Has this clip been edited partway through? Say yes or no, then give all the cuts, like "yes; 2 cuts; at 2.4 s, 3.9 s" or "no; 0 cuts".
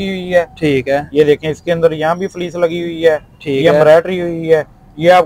no; 0 cuts